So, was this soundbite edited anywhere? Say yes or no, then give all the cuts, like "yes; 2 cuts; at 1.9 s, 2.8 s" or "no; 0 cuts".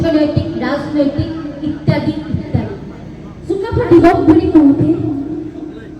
yes; 1 cut; at 3.7 s